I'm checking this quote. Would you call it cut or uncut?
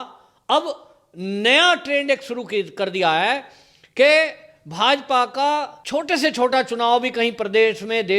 cut